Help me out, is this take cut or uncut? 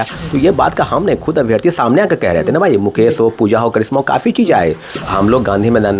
cut